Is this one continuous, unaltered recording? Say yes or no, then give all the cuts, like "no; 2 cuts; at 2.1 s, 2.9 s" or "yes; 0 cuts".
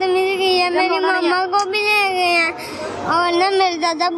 yes; 0 cuts